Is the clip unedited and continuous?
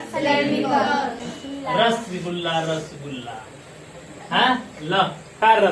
no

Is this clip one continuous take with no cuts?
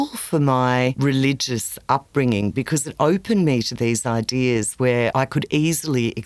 no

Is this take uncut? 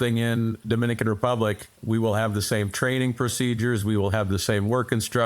no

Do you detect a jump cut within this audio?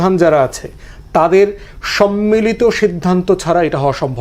no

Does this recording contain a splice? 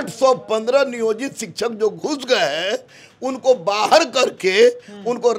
no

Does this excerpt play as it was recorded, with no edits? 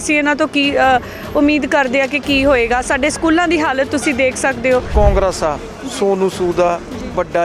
no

